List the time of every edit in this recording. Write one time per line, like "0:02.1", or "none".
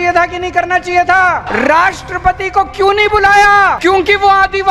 0:01.4
0:03.8